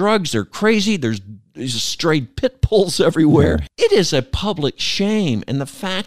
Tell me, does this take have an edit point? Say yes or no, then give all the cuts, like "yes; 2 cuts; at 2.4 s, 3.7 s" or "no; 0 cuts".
yes; 1 cut; at 3.7 s